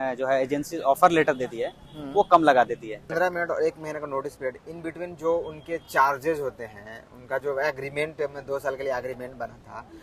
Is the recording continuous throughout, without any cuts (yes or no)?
no